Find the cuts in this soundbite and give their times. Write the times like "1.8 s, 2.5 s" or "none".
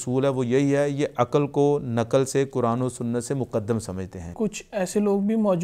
4.3 s